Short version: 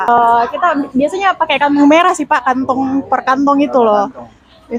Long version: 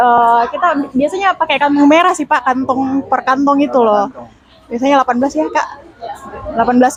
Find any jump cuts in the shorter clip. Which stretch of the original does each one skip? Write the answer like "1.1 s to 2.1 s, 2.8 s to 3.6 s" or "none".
none